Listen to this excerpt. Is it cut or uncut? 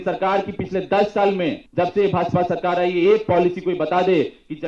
cut